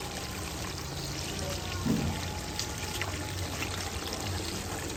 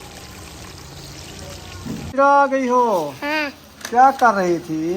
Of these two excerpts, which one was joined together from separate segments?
second; 1 cut; at 2.1 s

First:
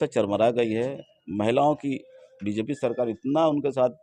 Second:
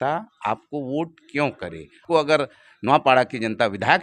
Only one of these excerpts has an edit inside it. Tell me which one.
second; 1 cut; at 2.0 s

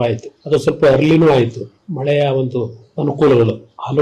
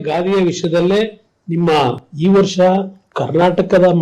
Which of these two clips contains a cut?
second; 1 cut; at 2.1 s

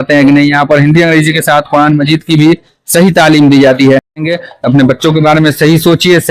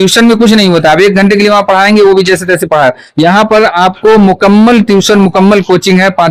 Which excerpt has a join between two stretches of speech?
first; 1 cut; at 4.2 s

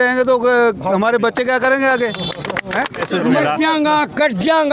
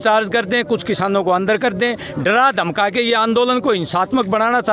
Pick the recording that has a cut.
first; 1 cut; at 3.1 s

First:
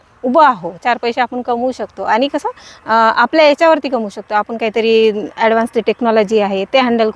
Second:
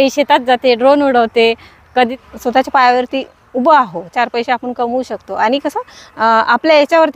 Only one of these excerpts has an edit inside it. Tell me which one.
second; 1 cut; at 2.1 s

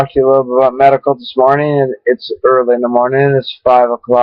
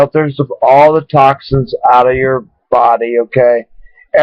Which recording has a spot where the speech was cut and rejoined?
second; 1 cut; at 3.3 s

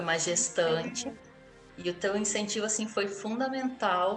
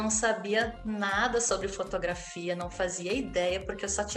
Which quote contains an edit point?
first; 1 cut; at 1.3 s

